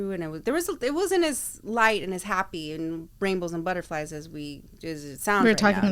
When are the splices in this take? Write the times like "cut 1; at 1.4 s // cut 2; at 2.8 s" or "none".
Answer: none